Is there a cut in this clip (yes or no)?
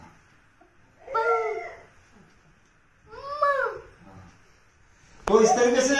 no